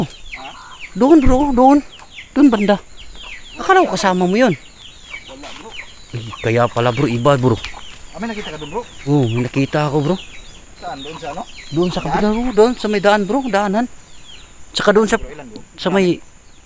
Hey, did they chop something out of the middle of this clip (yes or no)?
no